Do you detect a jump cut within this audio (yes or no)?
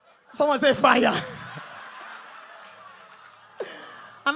no